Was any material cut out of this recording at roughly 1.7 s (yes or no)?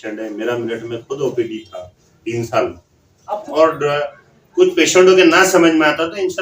no